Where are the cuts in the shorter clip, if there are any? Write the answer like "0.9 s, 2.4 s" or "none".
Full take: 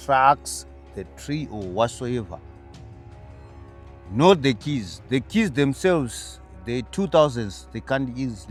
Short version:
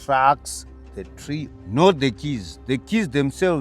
1.5 s

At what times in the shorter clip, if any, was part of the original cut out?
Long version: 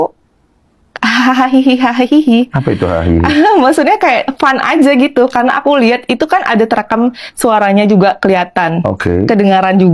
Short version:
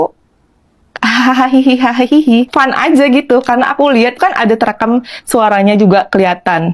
2.5 s, 4.2 s

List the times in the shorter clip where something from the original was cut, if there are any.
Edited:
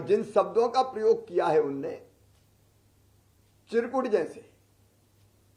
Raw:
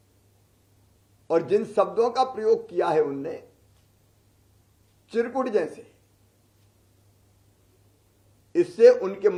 none

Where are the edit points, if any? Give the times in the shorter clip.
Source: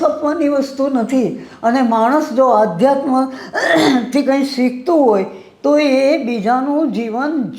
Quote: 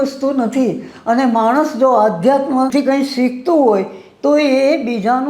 2.7 s

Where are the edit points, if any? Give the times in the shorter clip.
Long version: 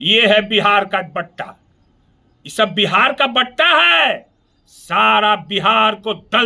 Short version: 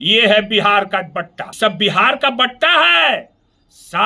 1.4 s

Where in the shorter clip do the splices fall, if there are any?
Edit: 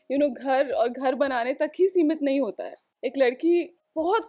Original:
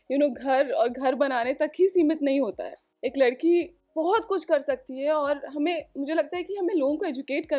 none

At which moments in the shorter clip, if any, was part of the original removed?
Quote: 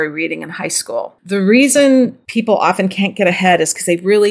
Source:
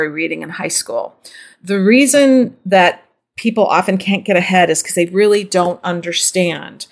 1.2 s, 2.2 s

